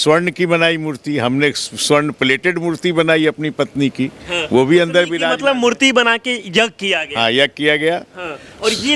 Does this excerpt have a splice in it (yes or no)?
no